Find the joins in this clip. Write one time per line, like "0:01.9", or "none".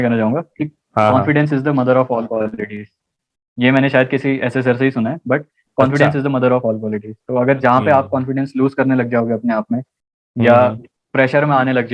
none